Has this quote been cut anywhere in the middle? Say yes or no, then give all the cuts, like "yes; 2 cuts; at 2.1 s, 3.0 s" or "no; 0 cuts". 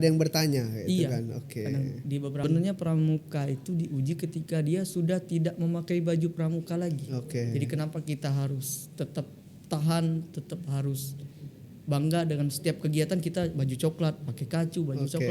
yes; 1 cut; at 2.4 s